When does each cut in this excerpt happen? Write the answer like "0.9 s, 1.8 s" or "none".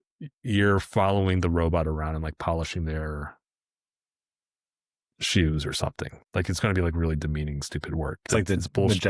6.1 s, 8.2 s